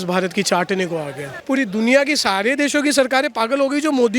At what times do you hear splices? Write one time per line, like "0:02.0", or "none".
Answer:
0:01.3